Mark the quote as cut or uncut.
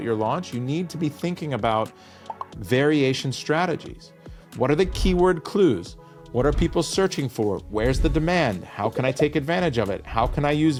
uncut